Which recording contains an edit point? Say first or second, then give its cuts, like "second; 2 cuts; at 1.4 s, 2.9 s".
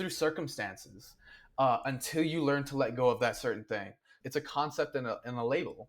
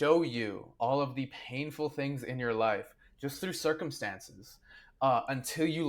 first; 1 cut; at 4.1 s